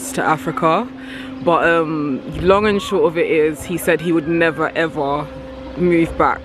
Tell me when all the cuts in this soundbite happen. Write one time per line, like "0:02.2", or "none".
none